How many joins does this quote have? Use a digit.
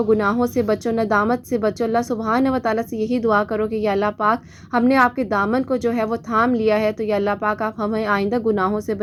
0